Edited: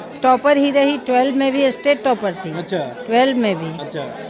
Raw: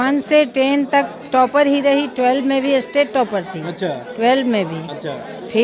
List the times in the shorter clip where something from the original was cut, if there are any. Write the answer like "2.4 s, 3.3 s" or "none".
none

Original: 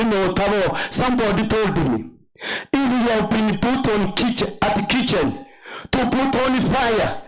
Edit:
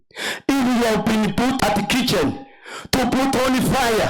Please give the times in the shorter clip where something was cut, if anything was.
1.6 s

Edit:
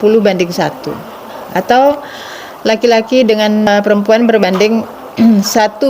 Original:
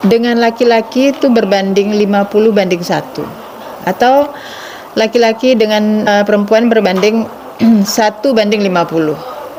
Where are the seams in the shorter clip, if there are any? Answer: 3.7 s

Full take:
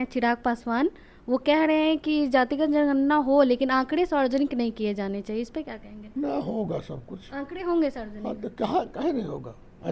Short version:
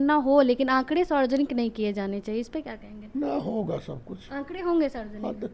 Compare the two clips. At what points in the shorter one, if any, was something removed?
none

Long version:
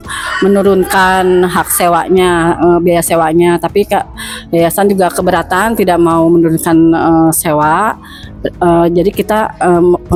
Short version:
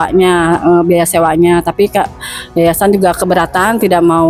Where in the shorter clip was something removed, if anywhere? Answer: none

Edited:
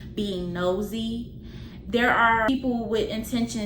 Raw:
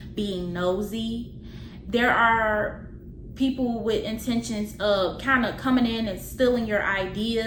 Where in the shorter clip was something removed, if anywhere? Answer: 2.5 s

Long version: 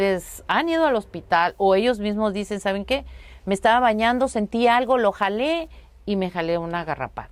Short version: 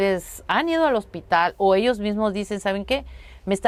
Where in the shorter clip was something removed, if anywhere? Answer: none

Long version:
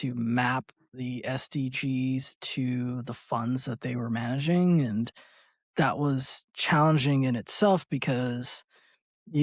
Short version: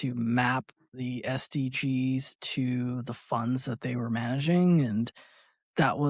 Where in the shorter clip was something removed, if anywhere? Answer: none

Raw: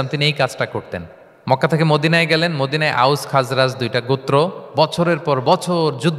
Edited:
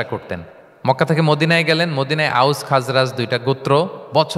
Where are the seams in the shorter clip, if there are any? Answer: none

